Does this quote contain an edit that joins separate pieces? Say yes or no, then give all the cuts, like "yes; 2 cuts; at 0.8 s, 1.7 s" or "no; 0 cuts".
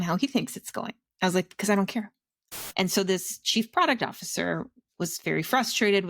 yes; 1 cut; at 2.6 s